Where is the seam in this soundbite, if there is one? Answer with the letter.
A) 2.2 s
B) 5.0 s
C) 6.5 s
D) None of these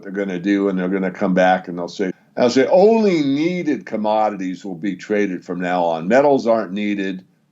A